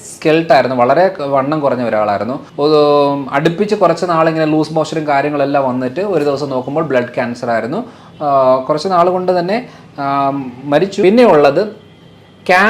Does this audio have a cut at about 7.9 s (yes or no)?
no